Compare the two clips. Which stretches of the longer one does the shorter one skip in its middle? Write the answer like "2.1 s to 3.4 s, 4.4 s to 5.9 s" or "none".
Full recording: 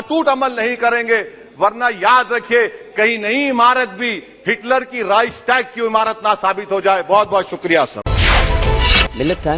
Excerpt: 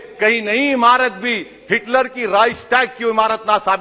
none